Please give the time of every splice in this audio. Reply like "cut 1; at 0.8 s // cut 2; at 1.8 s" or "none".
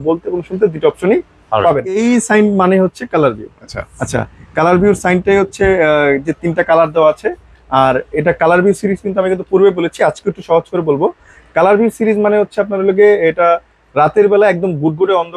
cut 1; at 2.0 s